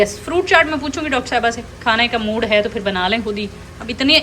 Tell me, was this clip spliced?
no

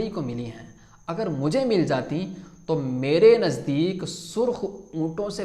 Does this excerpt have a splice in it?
no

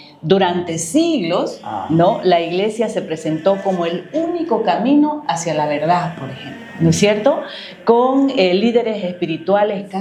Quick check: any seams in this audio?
no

